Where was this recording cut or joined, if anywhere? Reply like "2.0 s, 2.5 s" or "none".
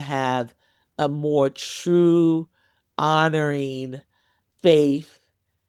none